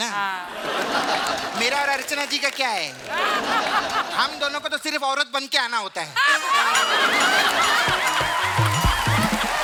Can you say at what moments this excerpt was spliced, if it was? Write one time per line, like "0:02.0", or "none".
none

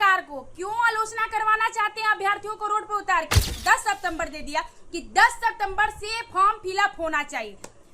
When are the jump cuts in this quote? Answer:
0:03.5

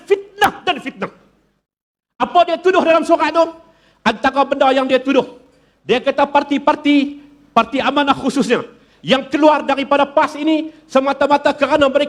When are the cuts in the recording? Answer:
none

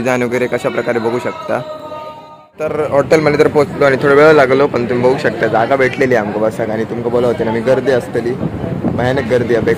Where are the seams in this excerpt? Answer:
0:02.7

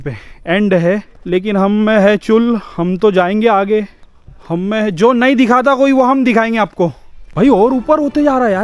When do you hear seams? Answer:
0:01.1
0:07.2

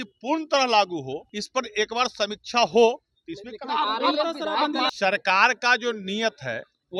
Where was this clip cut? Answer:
0:01.3
0:04.9

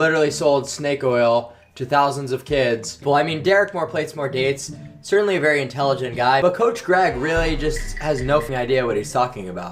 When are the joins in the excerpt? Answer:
0:03.0
0:08.4

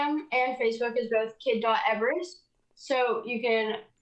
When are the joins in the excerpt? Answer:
none

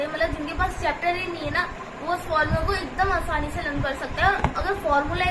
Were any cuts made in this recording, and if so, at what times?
none

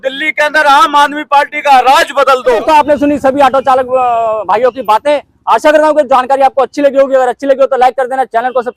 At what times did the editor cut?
none

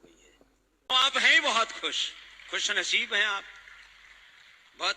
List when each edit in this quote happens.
0:01.0

